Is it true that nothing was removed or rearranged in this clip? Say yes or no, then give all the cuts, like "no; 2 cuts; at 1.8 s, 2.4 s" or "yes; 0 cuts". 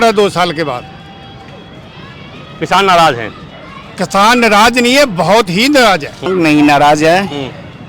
no; 1 cut; at 6.2 s